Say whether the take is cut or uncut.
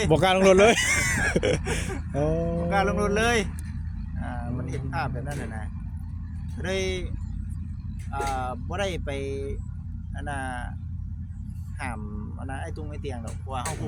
uncut